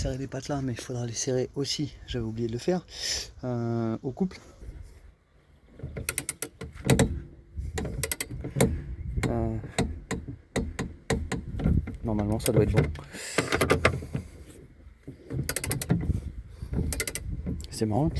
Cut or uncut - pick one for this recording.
cut